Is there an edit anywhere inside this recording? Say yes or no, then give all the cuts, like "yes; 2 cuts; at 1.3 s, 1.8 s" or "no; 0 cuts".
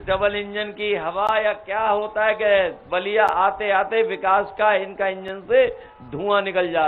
no; 0 cuts